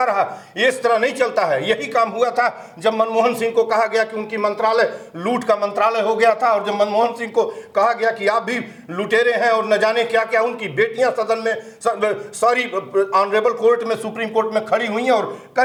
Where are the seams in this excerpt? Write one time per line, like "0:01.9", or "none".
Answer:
none